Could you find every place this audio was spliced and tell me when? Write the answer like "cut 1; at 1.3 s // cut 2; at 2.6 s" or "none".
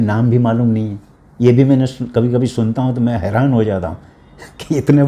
none